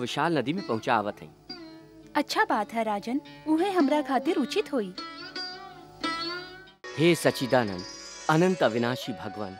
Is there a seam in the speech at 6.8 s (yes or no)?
yes